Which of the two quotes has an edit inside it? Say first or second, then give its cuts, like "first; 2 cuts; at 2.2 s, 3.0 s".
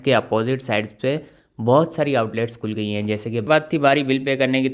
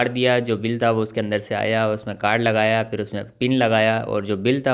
first; 1 cut; at 3.5 s